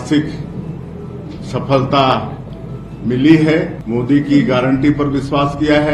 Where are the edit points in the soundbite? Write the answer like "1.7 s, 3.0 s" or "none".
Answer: 3.8 s